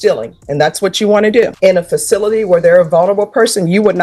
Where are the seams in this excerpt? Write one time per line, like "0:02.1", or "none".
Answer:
0:01.5